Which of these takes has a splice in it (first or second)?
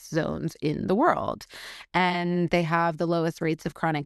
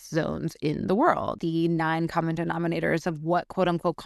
second